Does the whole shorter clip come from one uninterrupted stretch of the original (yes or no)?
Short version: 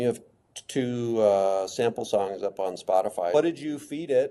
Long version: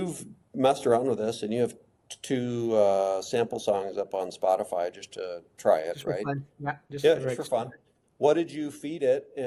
no